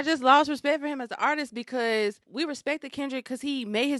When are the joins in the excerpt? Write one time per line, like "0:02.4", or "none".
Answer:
0:02.2